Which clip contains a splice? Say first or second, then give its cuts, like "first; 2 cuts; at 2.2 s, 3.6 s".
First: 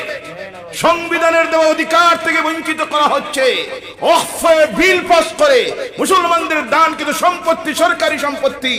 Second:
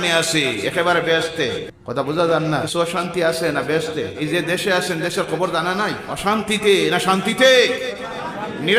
second; 4 cuts; at 1.7 s, 2.7 s, 4.2 s, 6.1 s